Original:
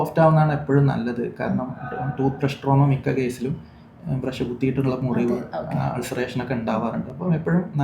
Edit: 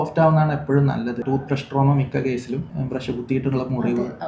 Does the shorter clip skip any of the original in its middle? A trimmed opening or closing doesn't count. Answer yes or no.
yes